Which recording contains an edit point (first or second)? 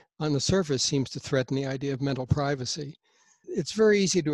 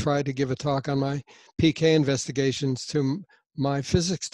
first